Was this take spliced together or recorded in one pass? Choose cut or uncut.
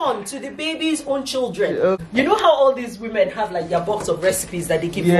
cut